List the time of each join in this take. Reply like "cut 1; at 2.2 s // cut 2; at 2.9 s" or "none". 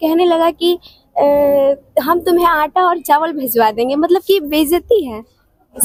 none